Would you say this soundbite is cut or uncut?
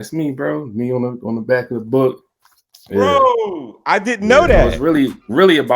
cut